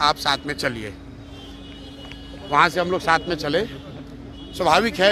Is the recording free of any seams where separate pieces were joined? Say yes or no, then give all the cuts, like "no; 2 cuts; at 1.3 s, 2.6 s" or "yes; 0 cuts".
yes; 0 cuts